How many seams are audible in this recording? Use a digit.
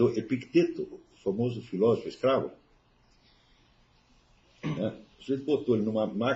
0